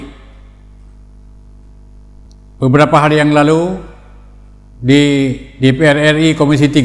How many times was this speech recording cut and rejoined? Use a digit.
1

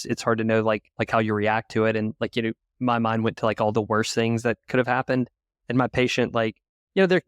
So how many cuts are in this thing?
1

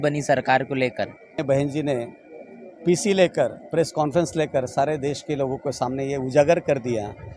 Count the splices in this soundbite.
1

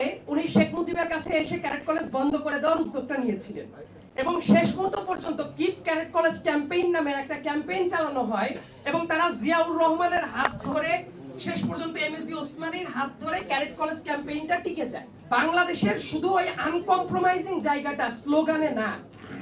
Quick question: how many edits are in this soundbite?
1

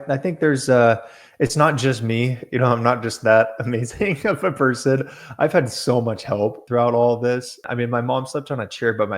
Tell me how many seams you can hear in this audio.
2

